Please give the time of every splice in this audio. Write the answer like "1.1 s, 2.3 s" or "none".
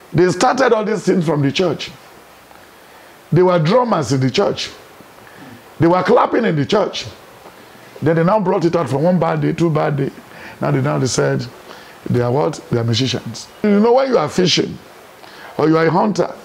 13.6 s